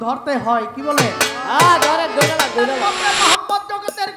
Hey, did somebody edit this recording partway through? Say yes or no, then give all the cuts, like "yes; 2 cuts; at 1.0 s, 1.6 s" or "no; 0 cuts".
yes; 1 cut; at 2.8 s